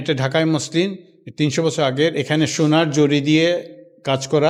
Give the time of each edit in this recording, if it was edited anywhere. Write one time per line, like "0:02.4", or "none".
none